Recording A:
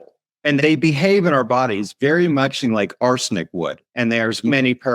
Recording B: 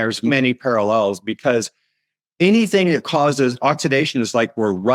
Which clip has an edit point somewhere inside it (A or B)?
A